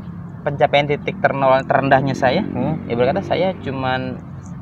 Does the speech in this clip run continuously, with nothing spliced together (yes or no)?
yes